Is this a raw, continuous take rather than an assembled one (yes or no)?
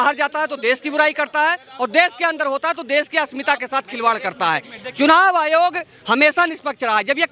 yes